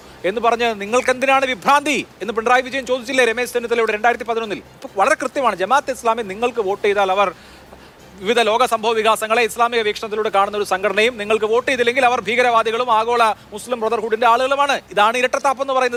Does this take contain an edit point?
no; 0 cuts

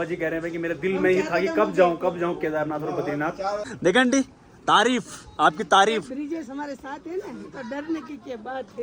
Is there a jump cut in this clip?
yes; 1 cut; at 3.7 s

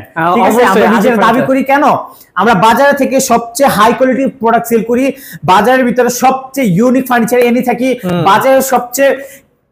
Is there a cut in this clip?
no; 0 cuts

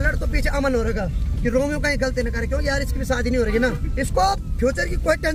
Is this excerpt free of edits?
yes; 0 cuts

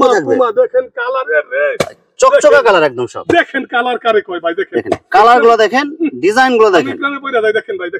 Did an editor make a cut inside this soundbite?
no; 0 cuts

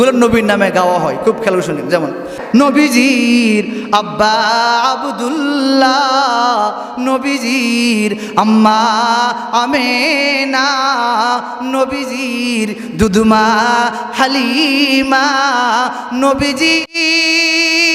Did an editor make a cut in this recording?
yes; 1 cut; at 2.4 s

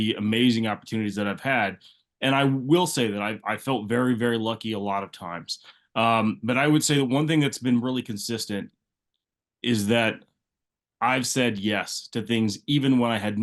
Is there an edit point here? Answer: no; 0 cuts

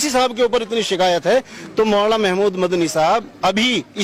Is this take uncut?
yes; 0 cuts

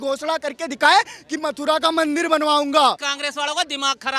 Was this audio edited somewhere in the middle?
yes; 1 cut; at 3.1 s

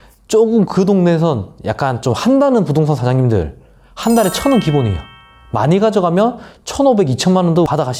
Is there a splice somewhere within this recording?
no; 0 cuts

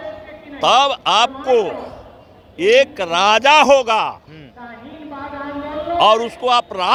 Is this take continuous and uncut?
yes; 0 cuts

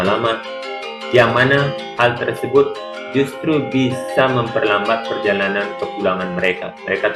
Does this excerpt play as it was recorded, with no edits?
yes; 0 cuts

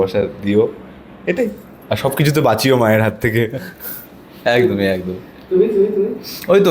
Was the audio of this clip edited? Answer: no; 0 cuts

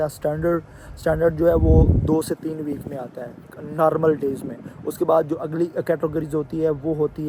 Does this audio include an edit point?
no; 0 cuts

